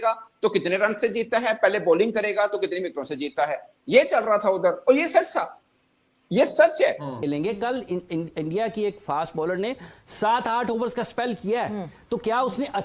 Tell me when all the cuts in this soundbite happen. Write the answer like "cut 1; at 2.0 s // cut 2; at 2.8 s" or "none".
cut 1; at 7.1 s